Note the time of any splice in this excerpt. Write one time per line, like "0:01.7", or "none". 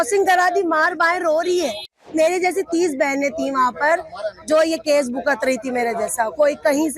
0:02.0